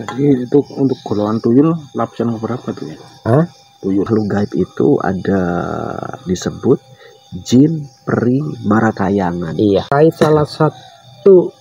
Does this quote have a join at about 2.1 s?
no; 2 cuts; at 4.1 s, 9.9 s

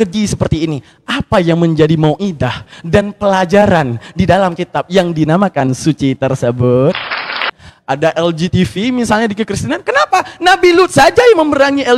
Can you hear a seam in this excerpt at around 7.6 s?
yes; 1 cut; at 7.6 s

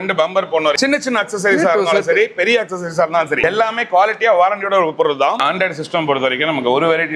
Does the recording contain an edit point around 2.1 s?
no; 3 cuts; at 0.8 s, 3.4 s, 5.4 s

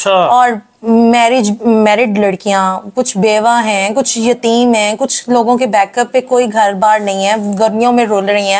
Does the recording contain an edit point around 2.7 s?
no; 0 cuts

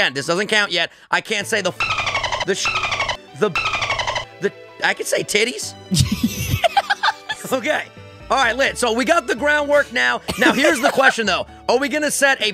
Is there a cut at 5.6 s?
no; 0 cuts

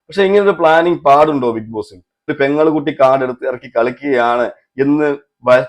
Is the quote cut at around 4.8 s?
no; 1 cut; at 2.3 s

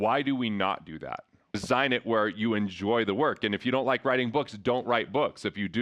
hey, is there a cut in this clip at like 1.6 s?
yes; 1 cut; at 1.6 s

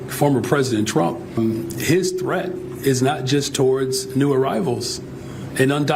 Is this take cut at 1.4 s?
yes; 1 cut; at 1.4 s

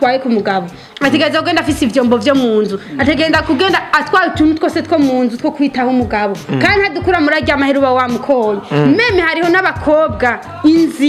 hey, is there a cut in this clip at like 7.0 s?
no; 0 cuts

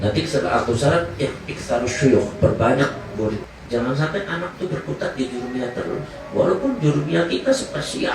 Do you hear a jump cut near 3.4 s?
yes; 1 cut; at 3.4 s

